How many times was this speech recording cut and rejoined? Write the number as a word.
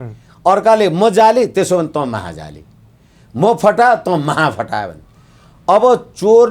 zero